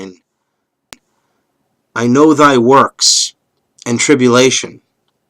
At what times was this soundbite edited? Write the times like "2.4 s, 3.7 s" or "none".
2.2 s